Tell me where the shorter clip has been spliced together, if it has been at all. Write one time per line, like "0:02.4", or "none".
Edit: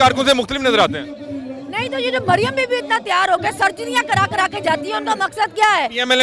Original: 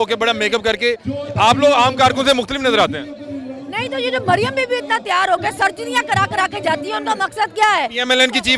none